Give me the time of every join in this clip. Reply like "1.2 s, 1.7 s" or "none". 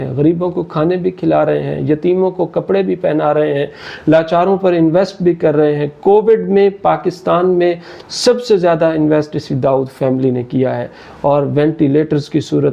none